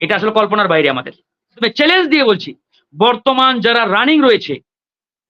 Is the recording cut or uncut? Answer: cut